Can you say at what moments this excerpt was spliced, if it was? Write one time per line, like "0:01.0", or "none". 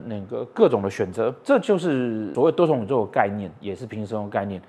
0:01.4
0:02.2